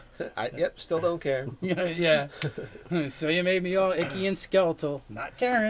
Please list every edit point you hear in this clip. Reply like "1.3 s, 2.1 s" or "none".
1.5 s